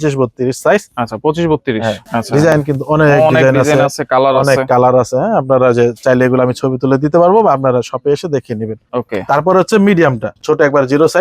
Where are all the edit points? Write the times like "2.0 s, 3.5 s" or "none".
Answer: 2.0 s, 8.8 s, 10.3 s